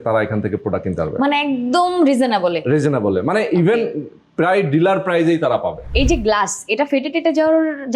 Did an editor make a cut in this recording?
yes; 1 cut; at 6.0 s

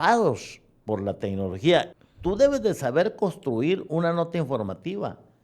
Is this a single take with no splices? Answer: no; 1 cut; at 1.9 s

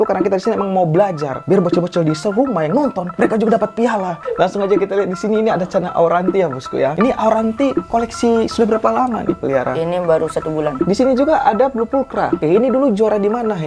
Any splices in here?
yes; 3 cuts; at 4.2 s, 10.8 s, 12.4 s

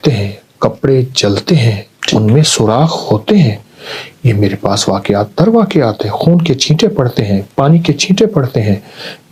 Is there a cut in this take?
no; 0 cuts

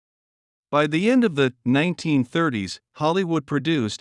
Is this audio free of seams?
yes; 0 cuts

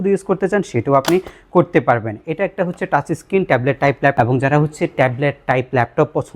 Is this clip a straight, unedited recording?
no; 1 cut; at 4.1 s

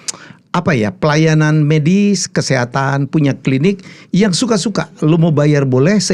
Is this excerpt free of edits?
yes; 0 cuts

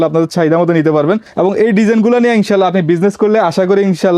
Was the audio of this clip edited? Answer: yes; 1 cut; at 1.3 s

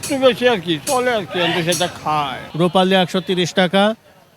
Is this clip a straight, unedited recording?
no; 1 cut; at 2.4 s

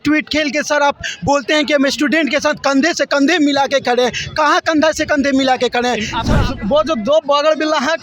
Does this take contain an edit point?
yes; 1 cut; at 6.2 s

